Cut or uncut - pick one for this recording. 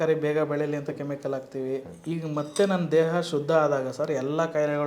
cut